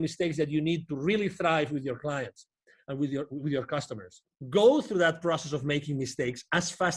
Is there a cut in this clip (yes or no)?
yes